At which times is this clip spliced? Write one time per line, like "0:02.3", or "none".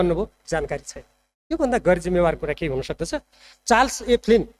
0:03.5